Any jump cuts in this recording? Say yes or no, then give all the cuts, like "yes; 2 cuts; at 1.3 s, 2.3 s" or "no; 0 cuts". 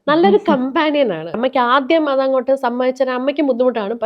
yes; 1 cut; at 1.4 s